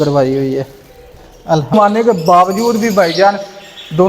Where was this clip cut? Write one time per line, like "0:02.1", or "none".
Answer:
0:01.7

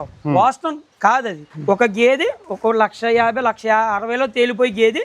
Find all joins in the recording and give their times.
0:01.5

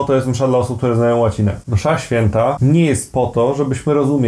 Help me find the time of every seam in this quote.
0:01.7
0:02.6

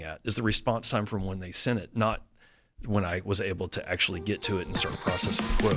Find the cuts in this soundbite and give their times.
none

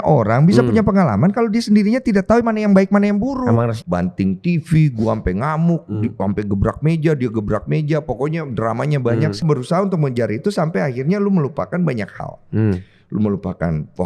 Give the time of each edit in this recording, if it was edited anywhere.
0:03.8
0:09.4

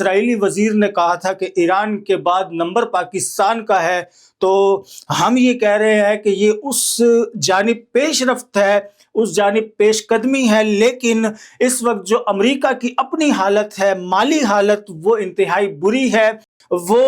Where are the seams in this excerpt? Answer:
none

